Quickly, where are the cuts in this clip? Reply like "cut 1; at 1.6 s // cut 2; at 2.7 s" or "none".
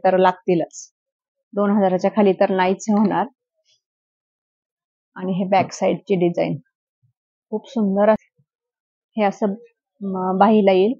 cut 1; at 8.2 s